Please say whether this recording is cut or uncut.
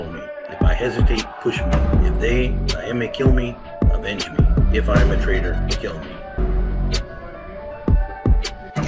uncut